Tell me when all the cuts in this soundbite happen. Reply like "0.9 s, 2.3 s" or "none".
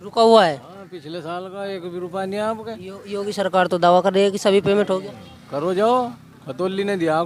none